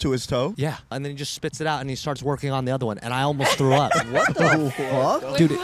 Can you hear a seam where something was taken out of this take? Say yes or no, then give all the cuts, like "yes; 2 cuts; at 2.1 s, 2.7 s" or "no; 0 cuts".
yes; 1 cut; at 0.9 s